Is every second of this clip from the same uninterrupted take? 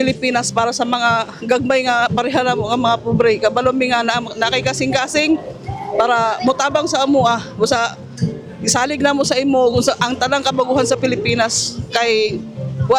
yes; 0 cuts

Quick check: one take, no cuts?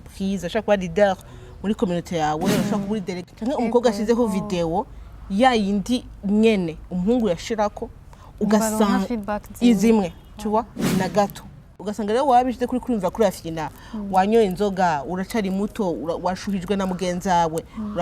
no; 2 cuts; at 3.1 s, 11.8 s

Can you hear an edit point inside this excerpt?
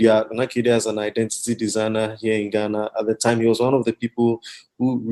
no; 0 cuts

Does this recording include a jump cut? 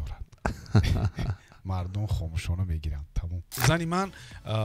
yes; 1 cut; at 3.6 s

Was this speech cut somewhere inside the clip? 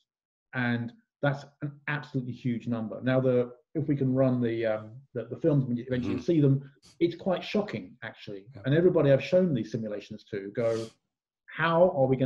no; 0 cuts

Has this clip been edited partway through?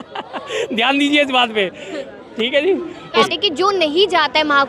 yes; 1 cut; at 3.3 s

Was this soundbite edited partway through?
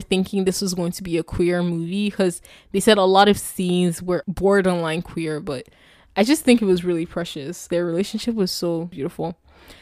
yes; 3 cuts; at 4.3 s, 7.6 s, 8.9 s

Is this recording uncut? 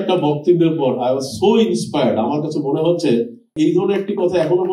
no; 1 cut; at 3.5 s

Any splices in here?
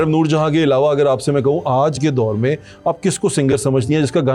no; 0 cuts

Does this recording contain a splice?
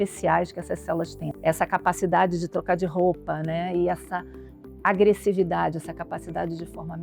yes; 1 cut; at 1.2 s

